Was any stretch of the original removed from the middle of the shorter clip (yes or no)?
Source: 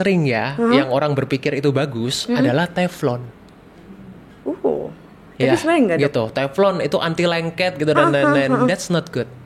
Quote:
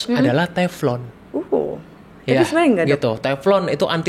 yes